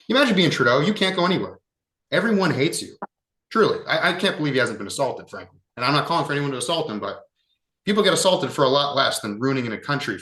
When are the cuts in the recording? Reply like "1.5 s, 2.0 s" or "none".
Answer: none